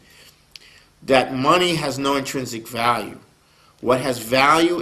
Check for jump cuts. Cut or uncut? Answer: uncut